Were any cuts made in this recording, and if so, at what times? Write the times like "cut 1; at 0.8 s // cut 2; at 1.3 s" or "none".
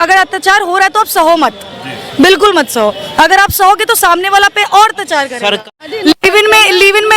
cut 1; at 5.6 s